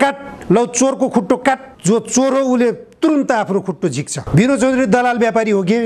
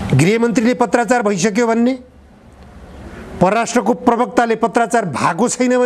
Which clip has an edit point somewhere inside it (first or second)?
first